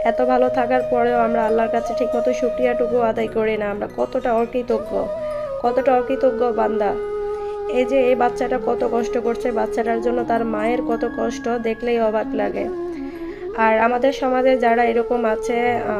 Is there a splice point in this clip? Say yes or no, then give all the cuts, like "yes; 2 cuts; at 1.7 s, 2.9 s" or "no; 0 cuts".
no; 0 cuts